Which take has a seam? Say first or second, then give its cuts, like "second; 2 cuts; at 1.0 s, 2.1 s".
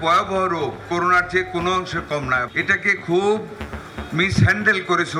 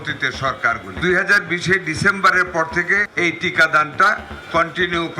second; 2 cuts; at 0.9 s, 3.1 s